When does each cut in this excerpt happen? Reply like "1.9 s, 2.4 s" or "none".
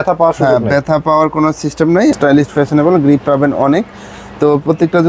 2.2 s